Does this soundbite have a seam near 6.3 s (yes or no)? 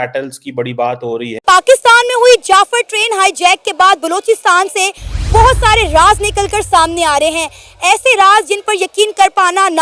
no